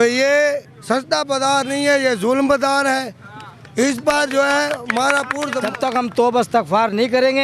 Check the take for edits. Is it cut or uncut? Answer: cut